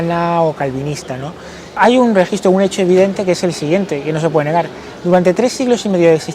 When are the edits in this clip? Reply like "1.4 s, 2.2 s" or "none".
1.7 s